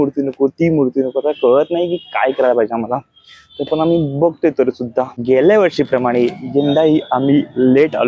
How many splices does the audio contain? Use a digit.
1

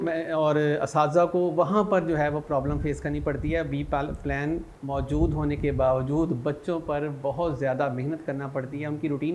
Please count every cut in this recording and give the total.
1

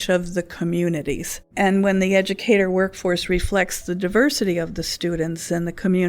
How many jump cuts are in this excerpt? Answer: 1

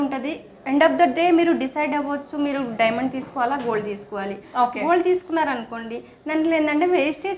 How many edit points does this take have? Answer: 0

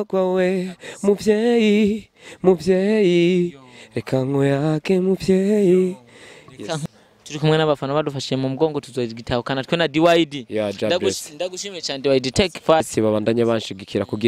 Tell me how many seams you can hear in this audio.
2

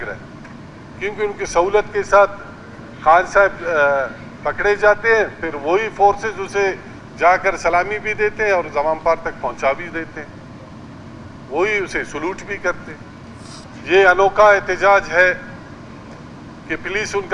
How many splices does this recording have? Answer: 1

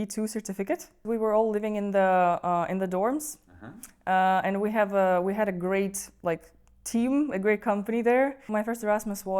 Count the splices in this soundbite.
2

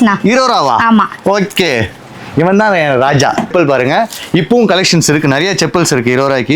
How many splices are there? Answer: 1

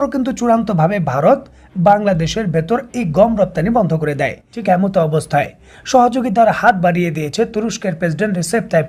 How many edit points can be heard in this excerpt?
1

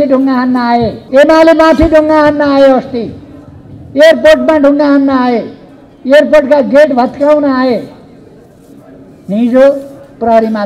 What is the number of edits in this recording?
1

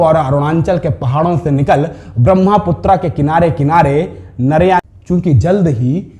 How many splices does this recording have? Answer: 1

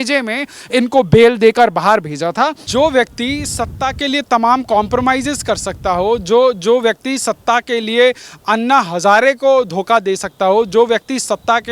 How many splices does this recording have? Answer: 1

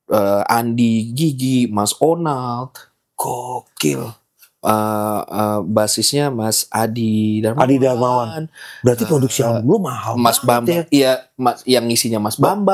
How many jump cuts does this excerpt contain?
0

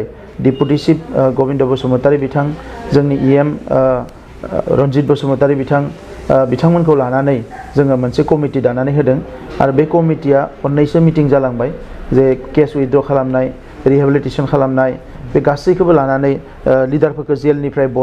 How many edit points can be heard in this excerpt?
0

